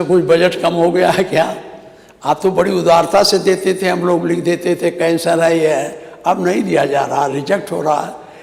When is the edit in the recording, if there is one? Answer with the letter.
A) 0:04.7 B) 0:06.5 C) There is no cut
C